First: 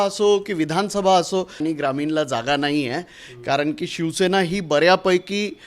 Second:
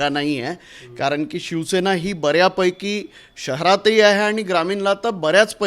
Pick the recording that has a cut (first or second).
first